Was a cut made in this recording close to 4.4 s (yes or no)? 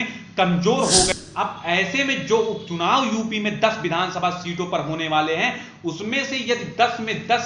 no